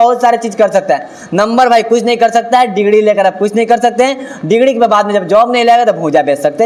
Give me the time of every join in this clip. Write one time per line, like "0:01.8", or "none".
none

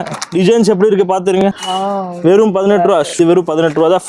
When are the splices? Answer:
0:01.6
0:03.2

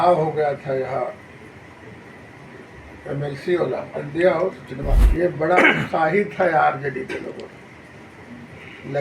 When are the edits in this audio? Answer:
0:05.0

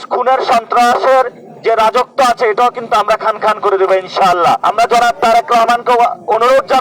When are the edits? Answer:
0:04.6

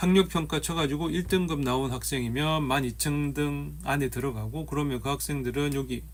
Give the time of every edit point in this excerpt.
none

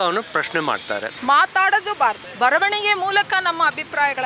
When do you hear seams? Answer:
0:01.1
0:02.3

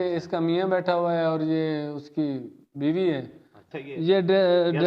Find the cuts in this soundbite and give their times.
0:03.6

